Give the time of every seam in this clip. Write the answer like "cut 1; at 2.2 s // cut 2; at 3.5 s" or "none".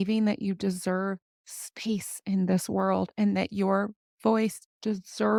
none